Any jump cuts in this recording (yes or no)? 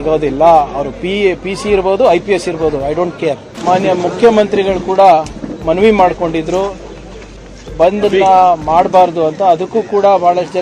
yes